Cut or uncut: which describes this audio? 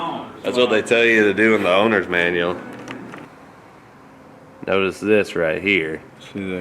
cut